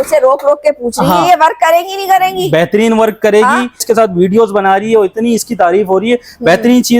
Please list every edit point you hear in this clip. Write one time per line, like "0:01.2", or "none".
0:03.8